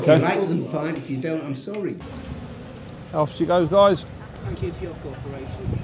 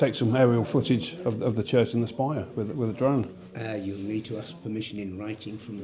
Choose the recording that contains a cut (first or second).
first